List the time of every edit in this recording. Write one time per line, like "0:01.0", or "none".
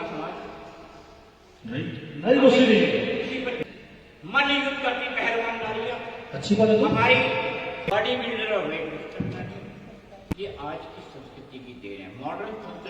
0:03.6
0:07.9
0:10.2